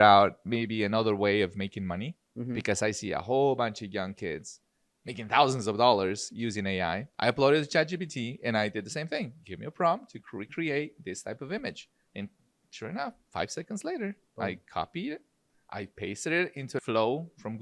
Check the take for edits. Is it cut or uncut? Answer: cut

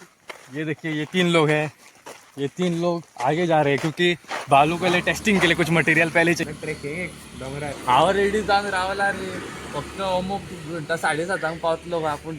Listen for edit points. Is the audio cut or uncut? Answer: cut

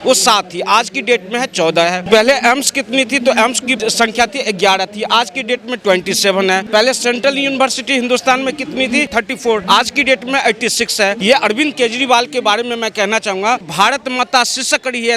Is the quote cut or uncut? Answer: cut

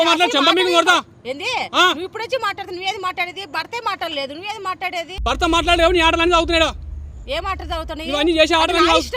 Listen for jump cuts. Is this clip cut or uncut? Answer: cut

